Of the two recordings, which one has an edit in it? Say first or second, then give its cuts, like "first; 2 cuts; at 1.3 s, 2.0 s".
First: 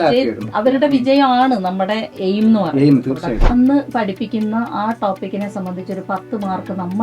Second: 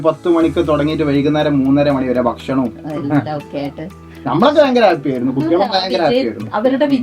first; 1 cut; at 3.4 s